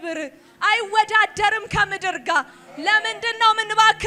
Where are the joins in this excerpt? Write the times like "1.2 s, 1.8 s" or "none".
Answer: none